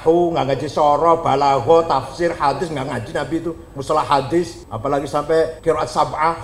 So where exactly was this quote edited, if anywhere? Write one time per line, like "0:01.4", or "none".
0:04.6
0:05.6